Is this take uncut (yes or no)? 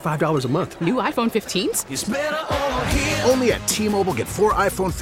yes